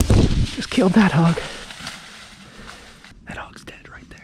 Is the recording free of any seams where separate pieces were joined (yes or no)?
no